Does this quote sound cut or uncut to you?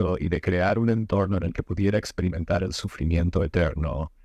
uncut